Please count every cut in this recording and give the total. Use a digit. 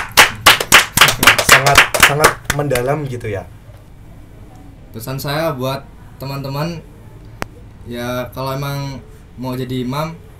1